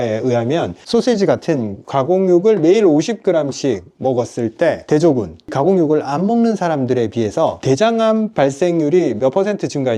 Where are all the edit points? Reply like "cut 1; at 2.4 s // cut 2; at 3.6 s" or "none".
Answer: none